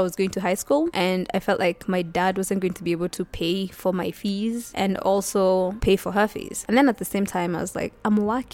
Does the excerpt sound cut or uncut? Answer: uncut